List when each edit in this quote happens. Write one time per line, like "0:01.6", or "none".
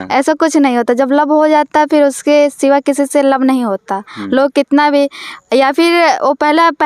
none